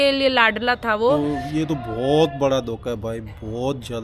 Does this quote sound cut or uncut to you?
cut